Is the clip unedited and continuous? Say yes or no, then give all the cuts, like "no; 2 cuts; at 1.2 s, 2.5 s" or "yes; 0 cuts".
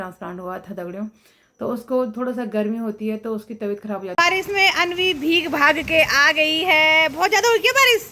no; 1 cut; at 4.1 s